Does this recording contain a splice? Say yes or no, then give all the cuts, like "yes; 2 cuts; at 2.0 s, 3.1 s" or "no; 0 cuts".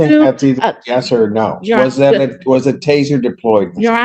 no; 0 cuts